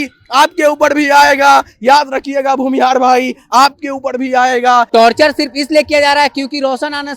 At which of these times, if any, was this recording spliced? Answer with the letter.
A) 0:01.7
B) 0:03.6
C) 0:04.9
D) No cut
C